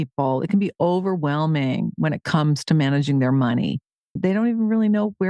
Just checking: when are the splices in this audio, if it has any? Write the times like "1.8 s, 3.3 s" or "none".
4.2 s